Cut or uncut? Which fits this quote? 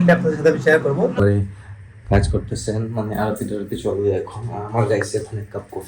cut